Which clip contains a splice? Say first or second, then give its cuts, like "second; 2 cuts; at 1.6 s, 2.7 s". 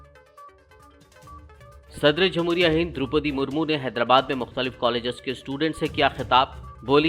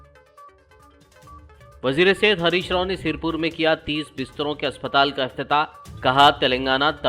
first; 1 cut; at 1.4 s